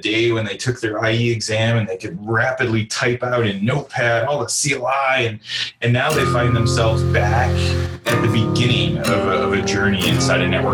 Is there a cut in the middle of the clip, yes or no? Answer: no